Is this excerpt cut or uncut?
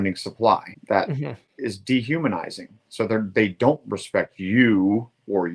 cut